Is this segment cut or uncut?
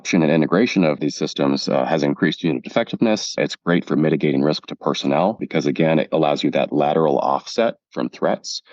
cut